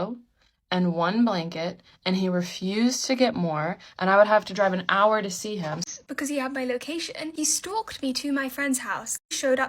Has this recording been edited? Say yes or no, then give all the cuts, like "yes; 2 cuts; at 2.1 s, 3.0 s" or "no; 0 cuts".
yes; 1 cut; at 5.8 s